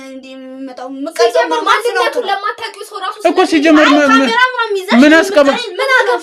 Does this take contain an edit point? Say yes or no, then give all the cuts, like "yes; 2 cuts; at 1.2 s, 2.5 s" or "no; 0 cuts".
no; 0 cuts